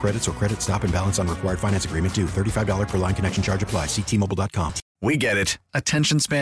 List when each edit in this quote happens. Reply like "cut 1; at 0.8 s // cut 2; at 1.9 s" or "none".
cut 1; at 4.8 s